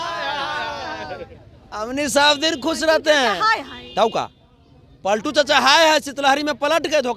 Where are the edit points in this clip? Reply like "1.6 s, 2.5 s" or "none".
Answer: none